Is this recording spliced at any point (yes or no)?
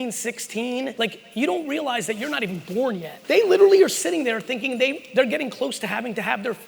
yes